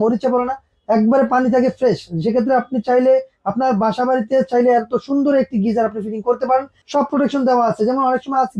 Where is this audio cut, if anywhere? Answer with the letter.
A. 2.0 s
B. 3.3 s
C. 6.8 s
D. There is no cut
C